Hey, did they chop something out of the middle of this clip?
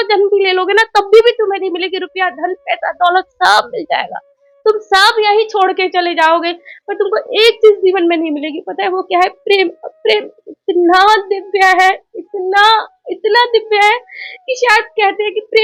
no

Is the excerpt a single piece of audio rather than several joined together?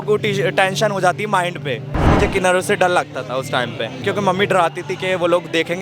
no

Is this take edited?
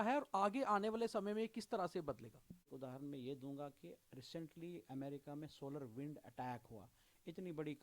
yes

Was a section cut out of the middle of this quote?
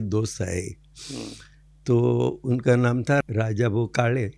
yes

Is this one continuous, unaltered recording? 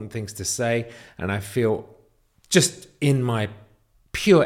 yes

